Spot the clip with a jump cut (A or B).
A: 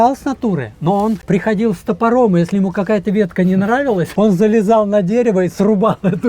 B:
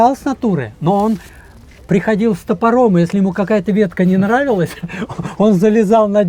A